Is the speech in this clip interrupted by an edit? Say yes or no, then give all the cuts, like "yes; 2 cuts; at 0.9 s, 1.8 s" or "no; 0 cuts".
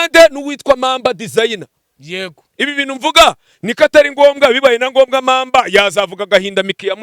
yes; 1 cut; at 2.4 s